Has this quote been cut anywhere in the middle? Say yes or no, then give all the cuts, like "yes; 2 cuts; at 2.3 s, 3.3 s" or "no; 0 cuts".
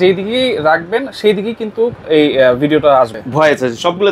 yes; 1 cut; at 3.1 s